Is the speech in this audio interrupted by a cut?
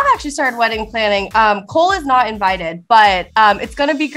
no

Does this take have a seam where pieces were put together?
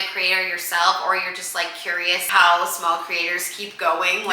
yes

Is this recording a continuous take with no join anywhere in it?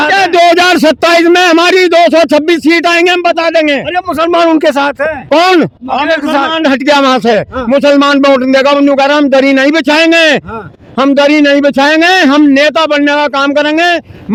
yes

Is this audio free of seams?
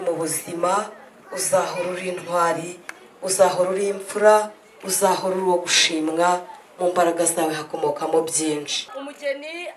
no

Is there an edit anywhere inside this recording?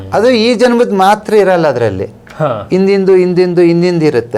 no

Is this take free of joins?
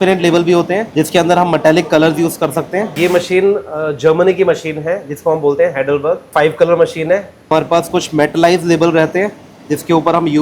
no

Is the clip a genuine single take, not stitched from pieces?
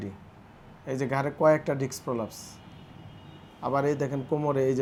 yes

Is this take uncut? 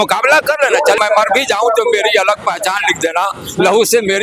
no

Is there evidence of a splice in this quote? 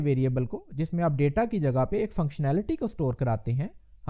no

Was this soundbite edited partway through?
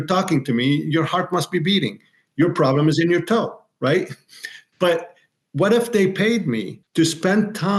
yes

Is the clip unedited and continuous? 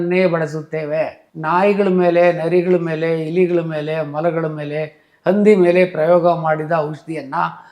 yes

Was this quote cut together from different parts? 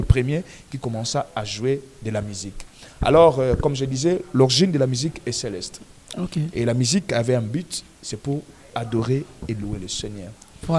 no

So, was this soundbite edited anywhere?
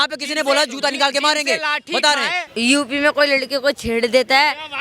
yes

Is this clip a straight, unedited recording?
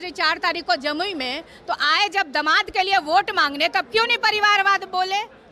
yes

